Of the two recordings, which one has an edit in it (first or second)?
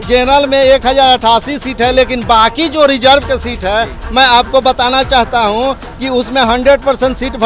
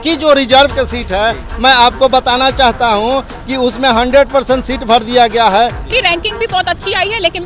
second